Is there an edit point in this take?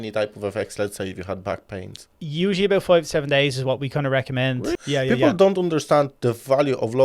yes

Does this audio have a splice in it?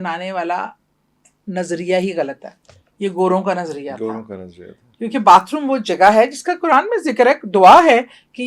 no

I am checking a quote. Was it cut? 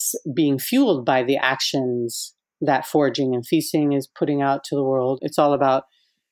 yes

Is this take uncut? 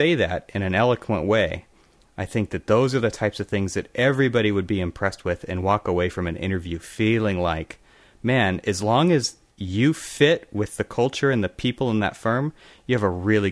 yes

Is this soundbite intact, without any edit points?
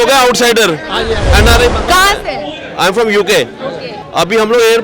no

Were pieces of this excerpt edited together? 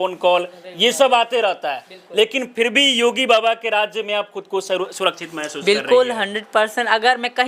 no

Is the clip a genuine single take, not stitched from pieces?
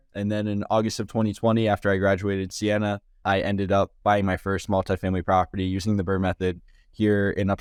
yes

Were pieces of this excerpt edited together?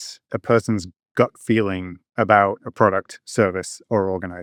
no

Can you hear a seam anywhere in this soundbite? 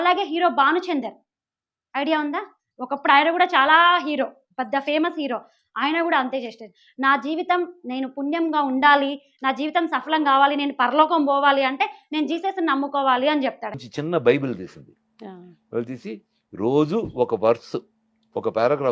no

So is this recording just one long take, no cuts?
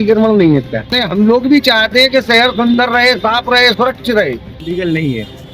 no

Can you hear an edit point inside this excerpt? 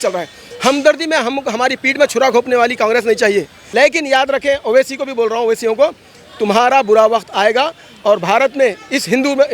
yes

